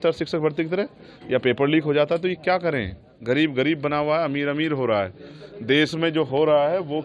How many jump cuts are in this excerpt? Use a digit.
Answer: 0